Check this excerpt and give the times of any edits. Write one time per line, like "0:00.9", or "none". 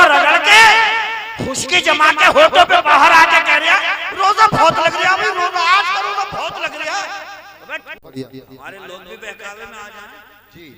0:08.0